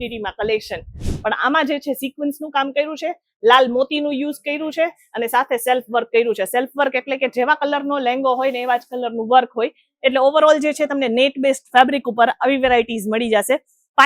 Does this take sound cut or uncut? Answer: cut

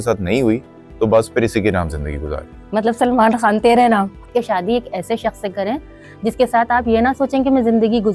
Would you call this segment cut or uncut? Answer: cut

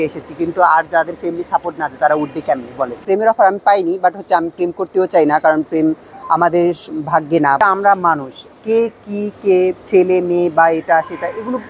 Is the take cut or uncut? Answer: cut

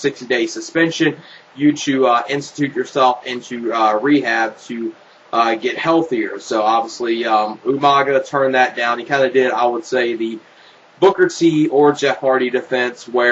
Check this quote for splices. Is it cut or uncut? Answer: cut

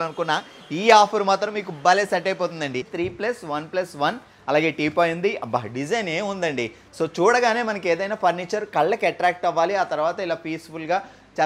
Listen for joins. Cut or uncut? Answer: cut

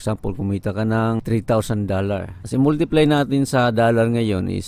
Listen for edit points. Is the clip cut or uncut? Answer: cut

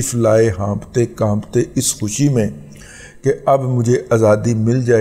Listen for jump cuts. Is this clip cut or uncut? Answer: uncut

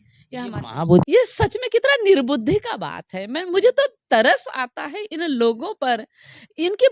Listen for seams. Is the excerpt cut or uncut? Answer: cut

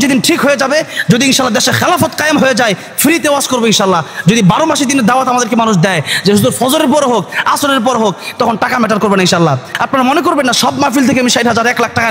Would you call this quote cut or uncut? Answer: cut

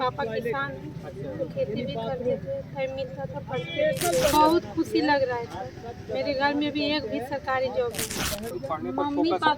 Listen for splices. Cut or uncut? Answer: cut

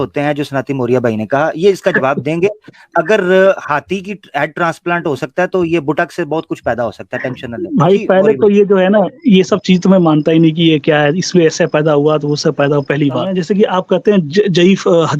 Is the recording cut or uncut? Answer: cut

